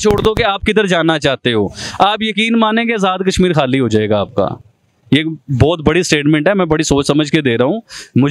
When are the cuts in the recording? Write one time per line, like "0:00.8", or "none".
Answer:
none